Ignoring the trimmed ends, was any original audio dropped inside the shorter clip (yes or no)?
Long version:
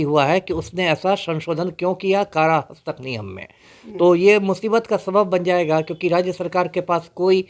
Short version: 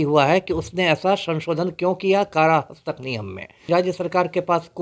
yes